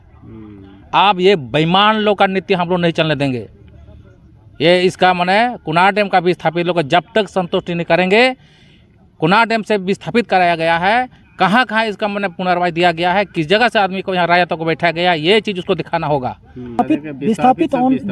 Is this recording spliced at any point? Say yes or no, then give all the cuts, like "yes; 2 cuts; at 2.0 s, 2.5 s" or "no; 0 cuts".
yes; 1 cut; at 16.8 s